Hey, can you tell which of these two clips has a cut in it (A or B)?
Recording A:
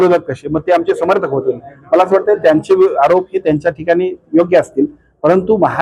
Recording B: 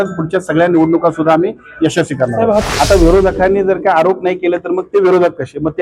B